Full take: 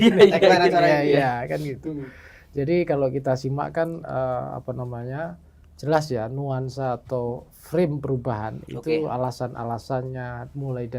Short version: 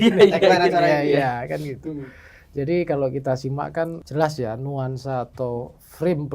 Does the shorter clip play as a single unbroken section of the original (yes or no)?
no